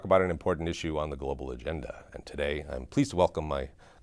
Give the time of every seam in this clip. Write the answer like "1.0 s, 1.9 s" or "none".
3.0 s